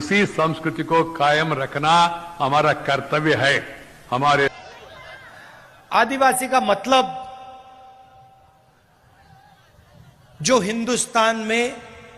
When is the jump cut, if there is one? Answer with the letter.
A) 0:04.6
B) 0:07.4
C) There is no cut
A